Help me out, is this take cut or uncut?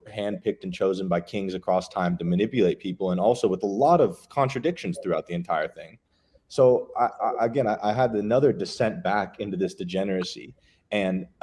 uncut